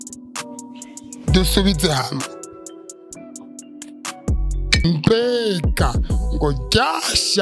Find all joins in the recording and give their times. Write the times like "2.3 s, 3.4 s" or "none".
4.8 s